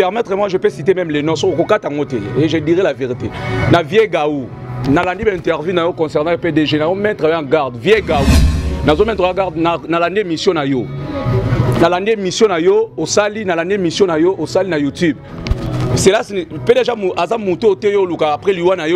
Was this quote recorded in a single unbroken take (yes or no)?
yes